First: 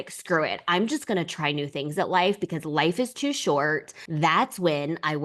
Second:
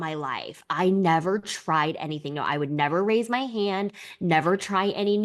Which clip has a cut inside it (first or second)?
first